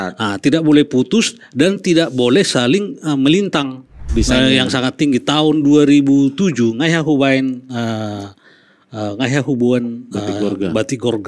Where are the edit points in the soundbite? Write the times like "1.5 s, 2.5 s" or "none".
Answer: 4.0 s